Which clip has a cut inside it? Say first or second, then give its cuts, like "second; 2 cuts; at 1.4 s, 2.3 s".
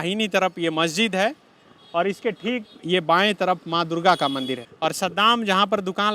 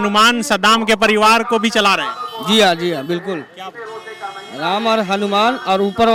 first; 1 cut; at 4.6 s